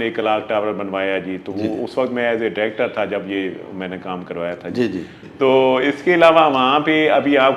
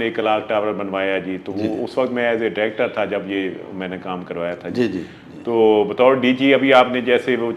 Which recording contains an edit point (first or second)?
first